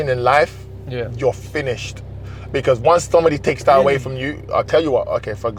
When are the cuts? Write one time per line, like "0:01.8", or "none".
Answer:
none